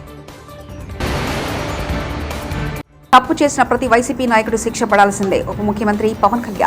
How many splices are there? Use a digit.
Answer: 2